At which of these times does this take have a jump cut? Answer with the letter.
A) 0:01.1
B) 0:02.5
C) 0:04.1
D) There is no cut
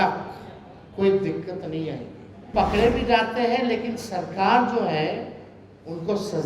B